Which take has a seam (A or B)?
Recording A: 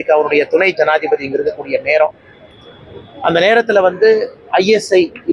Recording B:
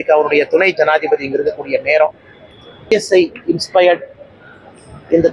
B